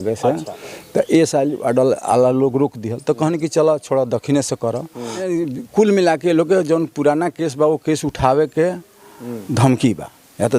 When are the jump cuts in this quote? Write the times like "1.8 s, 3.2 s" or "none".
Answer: 5.3 s